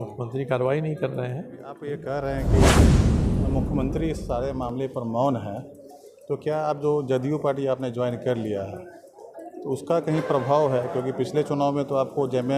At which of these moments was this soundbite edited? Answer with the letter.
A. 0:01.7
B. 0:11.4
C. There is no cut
A